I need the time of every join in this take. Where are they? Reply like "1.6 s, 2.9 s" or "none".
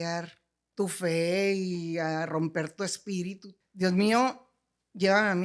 3.5 s